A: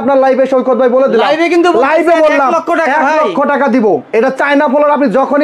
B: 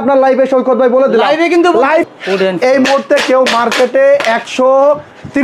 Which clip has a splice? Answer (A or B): B